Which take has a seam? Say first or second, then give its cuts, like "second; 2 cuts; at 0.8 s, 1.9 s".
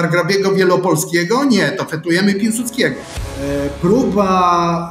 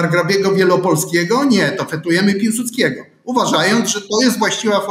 first; 1 cut; at 3.1 s